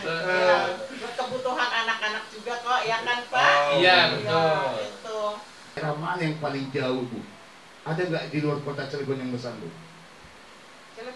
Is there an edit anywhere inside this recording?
yes; 1 cut; at 5.8 s

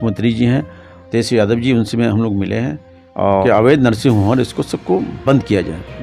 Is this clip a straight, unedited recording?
no; 1 cut; at 3.4 s

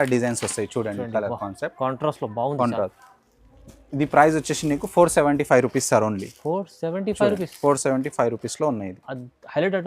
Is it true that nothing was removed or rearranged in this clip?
no; 1 cut; at 3.0 s

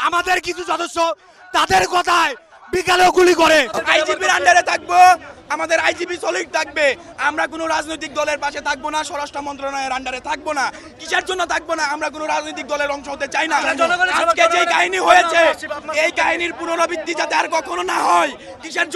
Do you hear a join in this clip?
yes; 1 cut; at 3.5 s

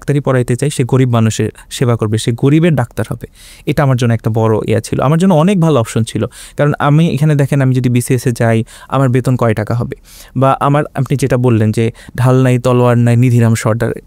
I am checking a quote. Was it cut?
no; 0 cuts

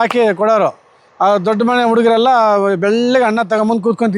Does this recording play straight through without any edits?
yes; 0 cuts

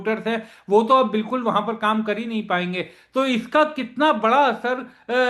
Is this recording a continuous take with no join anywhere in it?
yes; 0 cuts

